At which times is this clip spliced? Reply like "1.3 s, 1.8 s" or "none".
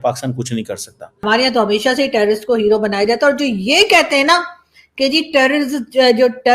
1.2 s